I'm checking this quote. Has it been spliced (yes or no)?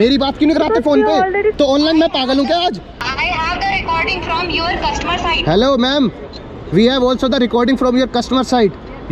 yes